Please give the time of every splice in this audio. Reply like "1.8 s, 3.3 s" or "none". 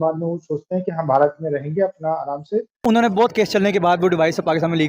2.8 s